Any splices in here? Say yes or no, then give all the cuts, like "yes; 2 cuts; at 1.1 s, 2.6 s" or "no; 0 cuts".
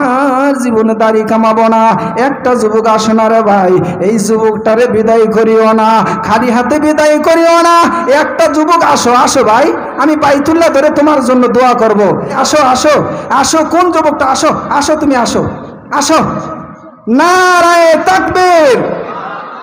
yes; 1 cut; at 12.4 s